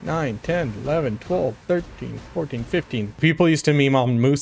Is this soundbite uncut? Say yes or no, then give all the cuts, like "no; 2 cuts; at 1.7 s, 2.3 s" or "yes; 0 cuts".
no; 1 cut; at 3.2 s